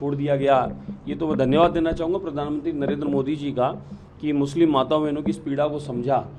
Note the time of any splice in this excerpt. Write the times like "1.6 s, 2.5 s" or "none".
none